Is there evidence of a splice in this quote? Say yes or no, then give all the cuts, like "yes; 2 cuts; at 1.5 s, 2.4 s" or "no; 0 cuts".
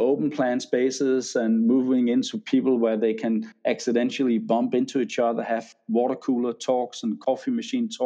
no; 0 cuts